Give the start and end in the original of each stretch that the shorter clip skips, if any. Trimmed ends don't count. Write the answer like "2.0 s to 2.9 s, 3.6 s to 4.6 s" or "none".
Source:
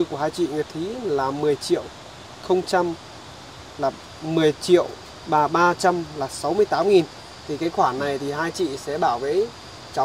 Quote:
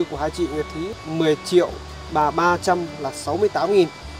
0.9 s to 4.1 s